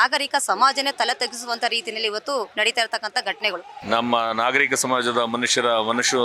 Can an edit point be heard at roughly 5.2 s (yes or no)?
no